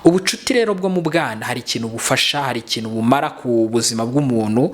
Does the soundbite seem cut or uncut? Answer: uncut